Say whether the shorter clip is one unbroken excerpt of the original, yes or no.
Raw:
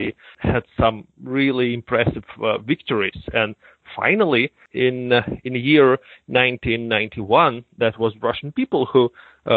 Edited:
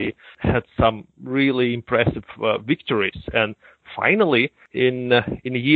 yes